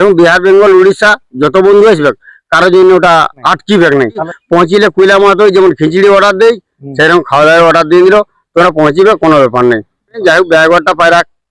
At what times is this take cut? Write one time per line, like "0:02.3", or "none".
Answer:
0:03.4
0:04.3
0:10.2

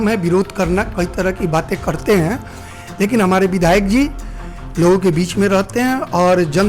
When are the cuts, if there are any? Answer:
none

